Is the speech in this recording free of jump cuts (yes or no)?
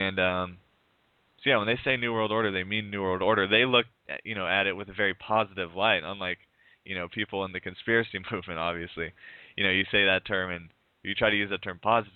yes